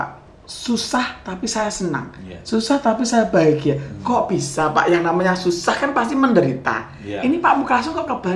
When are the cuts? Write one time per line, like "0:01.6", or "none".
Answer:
none